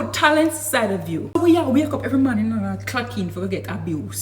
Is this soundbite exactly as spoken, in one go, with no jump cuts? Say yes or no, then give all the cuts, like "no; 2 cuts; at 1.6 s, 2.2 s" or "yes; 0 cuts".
no; 1 cut; at 1.4 s